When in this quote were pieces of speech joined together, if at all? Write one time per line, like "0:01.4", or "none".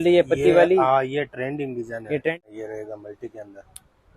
0:02.3